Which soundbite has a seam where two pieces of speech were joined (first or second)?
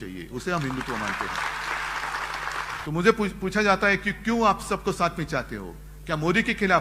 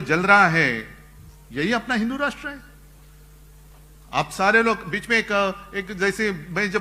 first